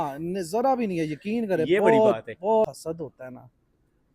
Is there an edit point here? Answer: yes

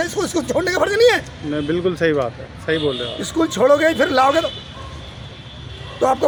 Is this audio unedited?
yes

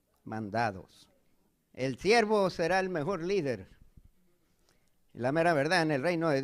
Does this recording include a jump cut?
yes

